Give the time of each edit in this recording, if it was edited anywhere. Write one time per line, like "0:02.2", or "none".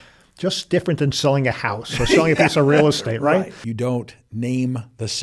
0:03.6